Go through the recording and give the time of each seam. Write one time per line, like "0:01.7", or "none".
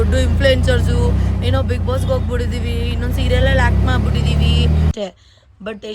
0:04.9